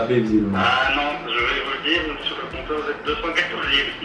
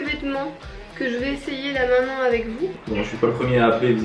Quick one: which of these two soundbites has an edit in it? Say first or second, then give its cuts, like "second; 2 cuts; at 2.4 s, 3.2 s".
second; 1 cut; at 2.7 s